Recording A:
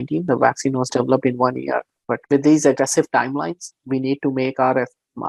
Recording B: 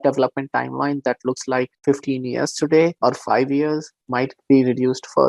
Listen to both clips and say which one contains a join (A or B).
B